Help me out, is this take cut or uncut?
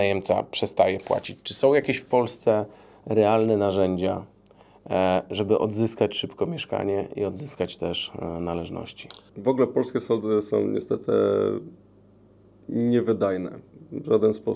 uncut